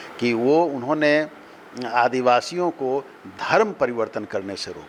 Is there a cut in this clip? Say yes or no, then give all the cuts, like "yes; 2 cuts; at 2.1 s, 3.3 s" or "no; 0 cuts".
no; 0 cuts